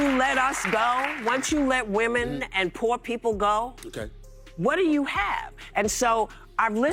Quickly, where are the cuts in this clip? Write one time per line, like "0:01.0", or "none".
none